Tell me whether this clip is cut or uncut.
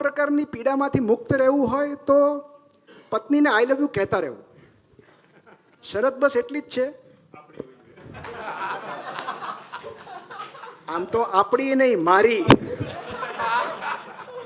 uncut